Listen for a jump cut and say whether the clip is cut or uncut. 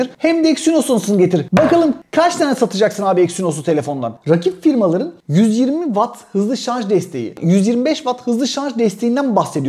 cut